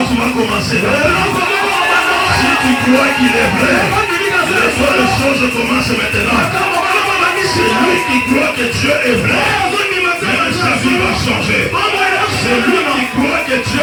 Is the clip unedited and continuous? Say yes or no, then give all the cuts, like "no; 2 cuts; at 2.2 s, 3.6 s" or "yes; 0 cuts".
yes; 0 cuts